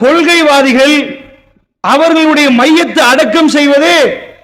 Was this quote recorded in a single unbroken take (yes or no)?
yes